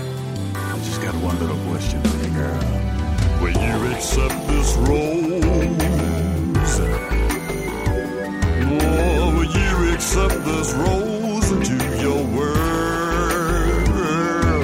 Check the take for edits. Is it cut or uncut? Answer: uncut